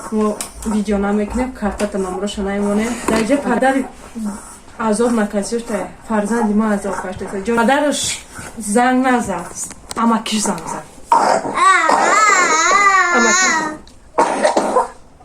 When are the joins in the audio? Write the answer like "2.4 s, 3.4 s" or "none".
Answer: 3.0 s, 7.6 s